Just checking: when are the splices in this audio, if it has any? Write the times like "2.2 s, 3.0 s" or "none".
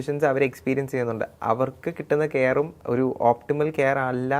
2.8 s